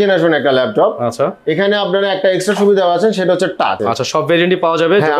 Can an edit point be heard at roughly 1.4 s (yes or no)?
no